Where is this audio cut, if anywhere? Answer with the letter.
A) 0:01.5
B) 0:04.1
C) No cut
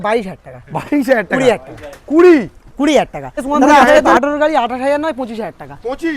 B